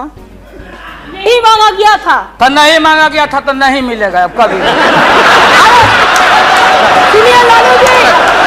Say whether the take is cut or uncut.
uncut